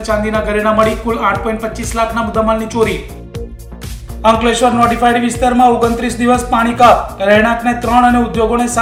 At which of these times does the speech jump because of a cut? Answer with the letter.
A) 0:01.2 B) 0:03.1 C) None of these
C